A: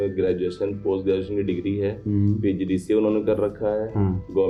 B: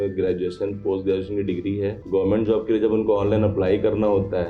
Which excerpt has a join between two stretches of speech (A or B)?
B